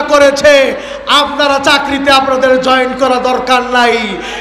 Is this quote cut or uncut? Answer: uncut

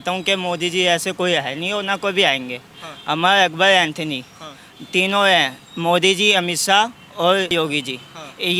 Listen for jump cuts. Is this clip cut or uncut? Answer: cut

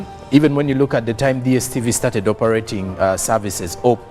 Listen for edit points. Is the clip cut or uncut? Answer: uncut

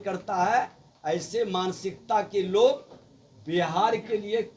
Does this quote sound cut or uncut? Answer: uncut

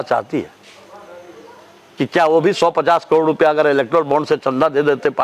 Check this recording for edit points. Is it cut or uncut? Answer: uncut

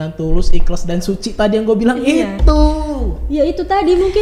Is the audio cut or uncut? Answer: uncut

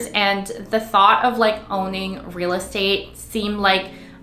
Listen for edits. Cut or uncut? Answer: uncut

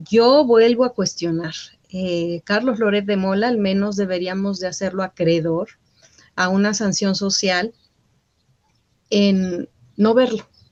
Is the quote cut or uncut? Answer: uncut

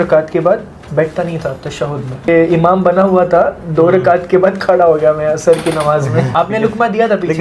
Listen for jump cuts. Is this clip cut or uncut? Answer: cut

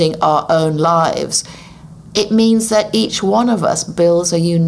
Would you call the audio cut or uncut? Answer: uncut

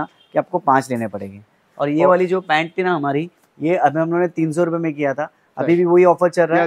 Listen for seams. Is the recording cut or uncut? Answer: uncut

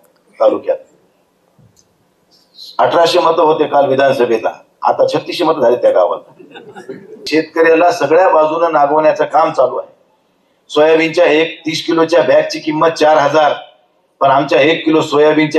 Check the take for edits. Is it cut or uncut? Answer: cut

